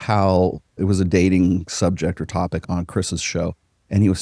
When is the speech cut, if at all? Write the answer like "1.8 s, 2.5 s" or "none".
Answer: 0.8 s, 2.6 s